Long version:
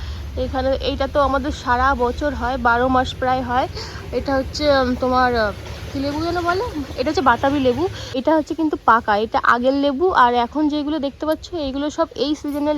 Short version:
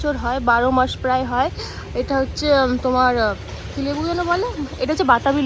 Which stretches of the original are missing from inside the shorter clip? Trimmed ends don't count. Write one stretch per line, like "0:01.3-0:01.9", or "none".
none